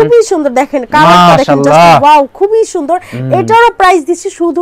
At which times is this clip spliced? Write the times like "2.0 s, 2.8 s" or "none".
none